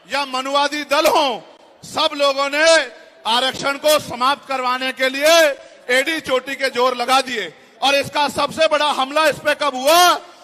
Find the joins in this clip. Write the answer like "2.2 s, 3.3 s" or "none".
none